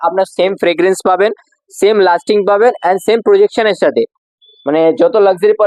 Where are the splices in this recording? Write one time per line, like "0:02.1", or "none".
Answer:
none